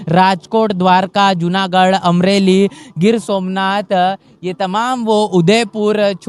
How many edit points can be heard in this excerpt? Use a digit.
0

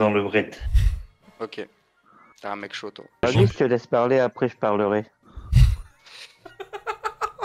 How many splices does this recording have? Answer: 1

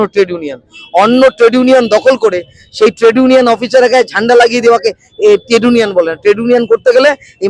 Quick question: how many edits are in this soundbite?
0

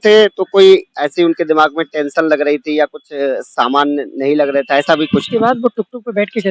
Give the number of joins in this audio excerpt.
1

